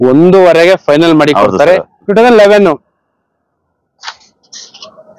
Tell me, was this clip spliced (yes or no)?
yes